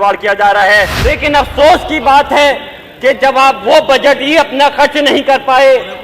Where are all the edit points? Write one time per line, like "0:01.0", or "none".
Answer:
0:01.0

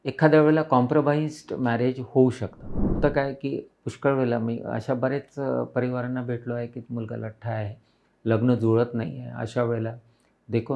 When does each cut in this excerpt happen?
0:03.0

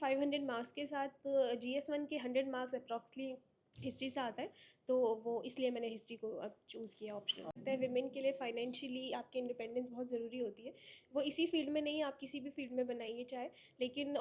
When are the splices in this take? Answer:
0:07.6

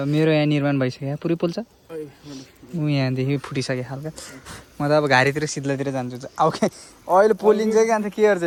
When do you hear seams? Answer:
none

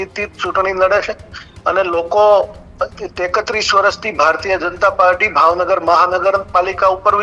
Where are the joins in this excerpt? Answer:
none

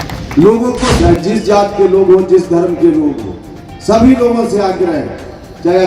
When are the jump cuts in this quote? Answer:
0:00.9

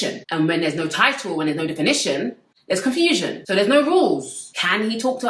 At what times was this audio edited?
none

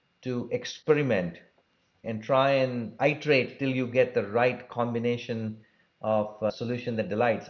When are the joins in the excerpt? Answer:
0:02.0
0:02.9
0:06.5

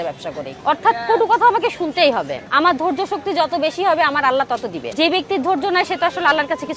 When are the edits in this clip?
0:02.4
0:04.8

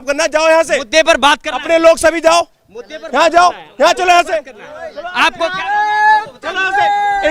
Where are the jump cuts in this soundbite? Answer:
none

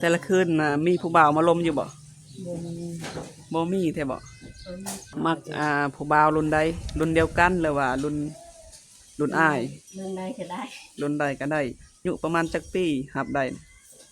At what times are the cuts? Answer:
0:05.0
0:12.0

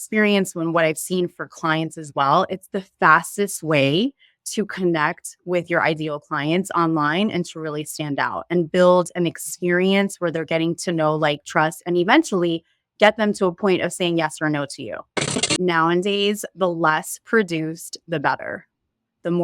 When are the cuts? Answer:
0:15.5

